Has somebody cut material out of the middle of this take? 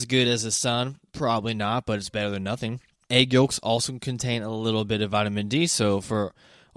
yes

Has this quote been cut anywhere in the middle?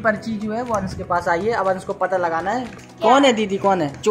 no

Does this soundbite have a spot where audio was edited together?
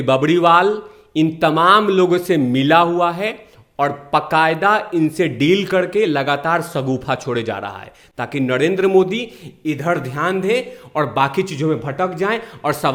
no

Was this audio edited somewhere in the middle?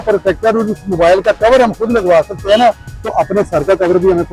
no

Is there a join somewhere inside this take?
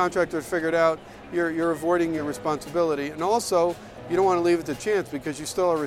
yes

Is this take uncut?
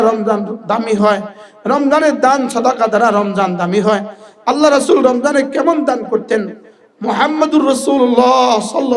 yes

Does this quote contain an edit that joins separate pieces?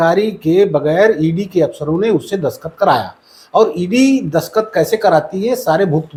no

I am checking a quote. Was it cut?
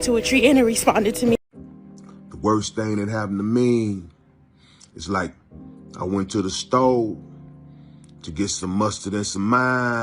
yes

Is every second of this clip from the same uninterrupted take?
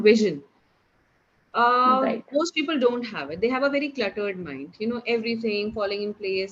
yes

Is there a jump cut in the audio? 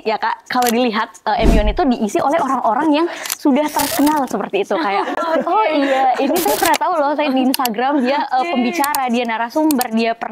no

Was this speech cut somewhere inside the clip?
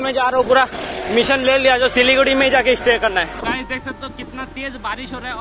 yes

